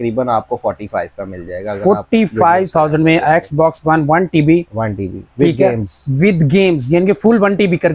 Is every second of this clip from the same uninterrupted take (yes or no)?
yes